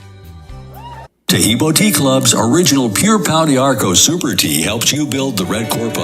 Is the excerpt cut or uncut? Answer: cut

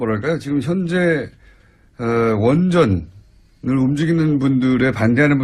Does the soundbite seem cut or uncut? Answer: cut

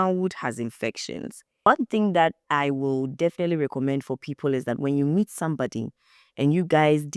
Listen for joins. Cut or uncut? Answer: cut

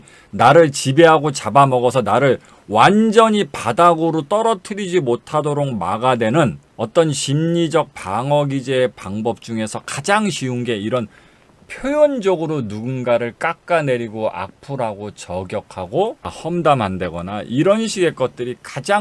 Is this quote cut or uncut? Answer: cut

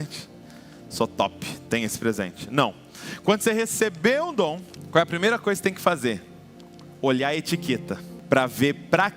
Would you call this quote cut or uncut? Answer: cut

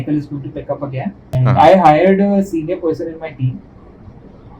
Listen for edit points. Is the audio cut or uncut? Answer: cut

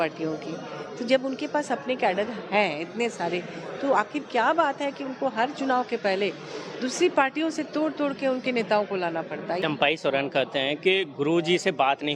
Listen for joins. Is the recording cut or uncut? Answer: cut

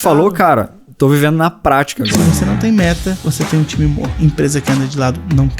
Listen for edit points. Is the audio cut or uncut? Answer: cut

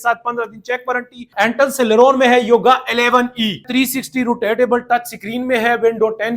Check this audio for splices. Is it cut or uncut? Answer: cut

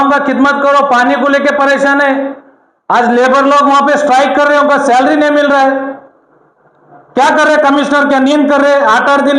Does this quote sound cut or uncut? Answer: uncut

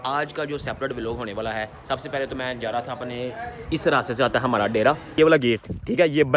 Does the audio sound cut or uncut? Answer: cut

